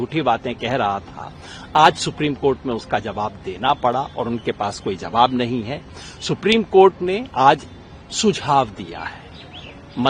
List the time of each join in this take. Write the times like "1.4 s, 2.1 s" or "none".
none